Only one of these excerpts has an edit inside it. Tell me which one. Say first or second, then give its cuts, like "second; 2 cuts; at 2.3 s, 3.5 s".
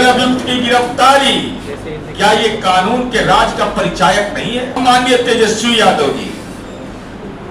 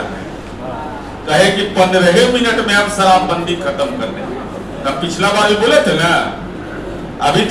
first; 1 cut; at 4.8 s